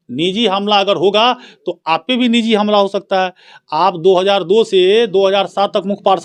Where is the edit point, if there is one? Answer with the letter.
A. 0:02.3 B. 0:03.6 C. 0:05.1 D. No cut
D